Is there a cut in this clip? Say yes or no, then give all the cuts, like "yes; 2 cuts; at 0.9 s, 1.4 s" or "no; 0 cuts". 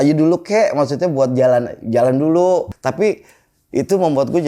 yes; 1 cut; at 2.7 s